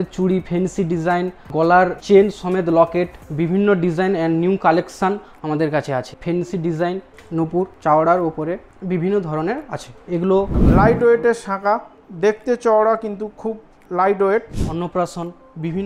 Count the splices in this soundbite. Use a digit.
5